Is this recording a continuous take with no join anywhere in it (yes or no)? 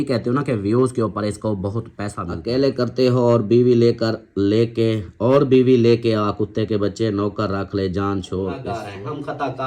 no